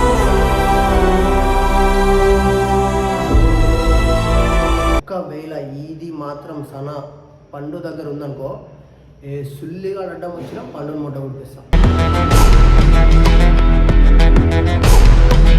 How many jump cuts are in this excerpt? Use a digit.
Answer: 1